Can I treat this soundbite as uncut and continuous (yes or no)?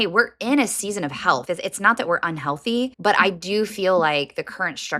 no